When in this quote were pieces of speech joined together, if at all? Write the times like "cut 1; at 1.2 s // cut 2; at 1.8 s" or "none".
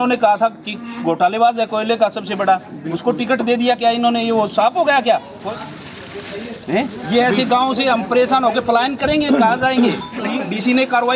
cut 1; at 5.4 s // cut 2; at 10.2 s